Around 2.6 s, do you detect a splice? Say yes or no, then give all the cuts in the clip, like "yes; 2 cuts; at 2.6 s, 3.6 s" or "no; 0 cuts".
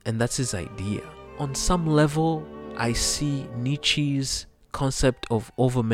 yes; 2 cuts; at 1.2 s, 2.6 s